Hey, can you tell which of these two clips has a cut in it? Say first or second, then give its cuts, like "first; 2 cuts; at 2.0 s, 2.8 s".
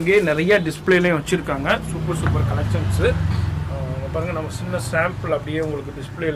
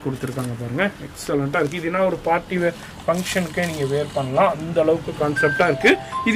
first; 1 cut; at 4.0 s